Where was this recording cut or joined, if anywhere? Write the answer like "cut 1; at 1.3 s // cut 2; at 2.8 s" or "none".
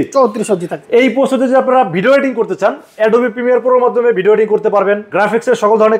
cut 1; at 0.8 s // cut 2; at 5.1 s

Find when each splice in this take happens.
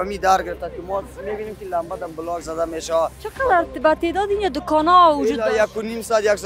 cut 1; at 3.2 s

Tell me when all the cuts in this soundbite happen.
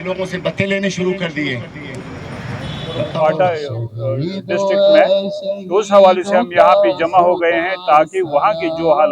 cut 1; at 3.1 s

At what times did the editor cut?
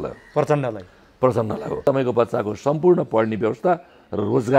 cut 1; at 1.8 s

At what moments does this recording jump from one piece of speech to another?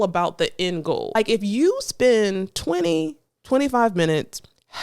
cut 1; at 1.1 s

